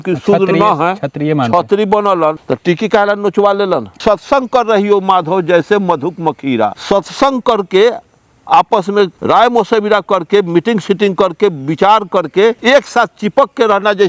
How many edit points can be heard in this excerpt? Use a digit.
5